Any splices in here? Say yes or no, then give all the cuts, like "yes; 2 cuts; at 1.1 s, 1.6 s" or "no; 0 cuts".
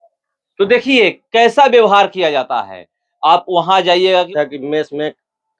yes; 1 cut; at 4.3 s